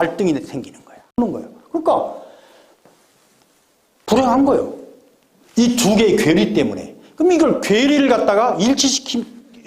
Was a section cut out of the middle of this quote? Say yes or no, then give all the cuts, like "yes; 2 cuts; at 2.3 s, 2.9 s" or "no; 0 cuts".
yes; 1 cut; at 1.2 s